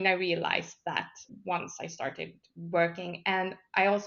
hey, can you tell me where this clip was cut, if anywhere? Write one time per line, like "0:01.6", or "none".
0:01.2